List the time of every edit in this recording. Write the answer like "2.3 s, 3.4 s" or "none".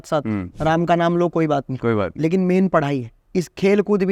3.1 s